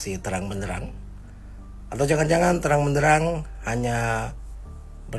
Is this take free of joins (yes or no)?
yes